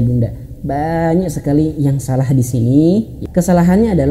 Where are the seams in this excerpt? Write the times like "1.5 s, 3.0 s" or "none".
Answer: 3.2 s